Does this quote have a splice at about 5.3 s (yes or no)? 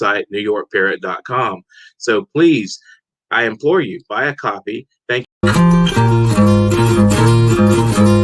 yes